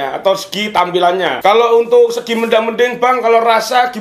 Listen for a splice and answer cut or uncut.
cut